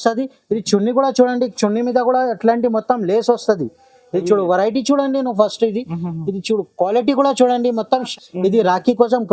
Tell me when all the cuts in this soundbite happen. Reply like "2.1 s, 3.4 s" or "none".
8.1 s